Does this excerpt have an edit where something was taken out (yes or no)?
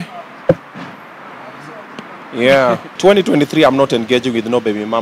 yes